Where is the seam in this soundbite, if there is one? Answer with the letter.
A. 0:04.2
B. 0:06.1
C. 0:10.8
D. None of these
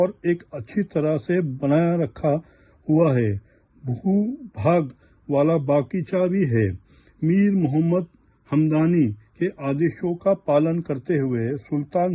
D